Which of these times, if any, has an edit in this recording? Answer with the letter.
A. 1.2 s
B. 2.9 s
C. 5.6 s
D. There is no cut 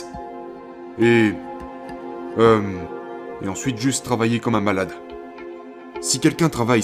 C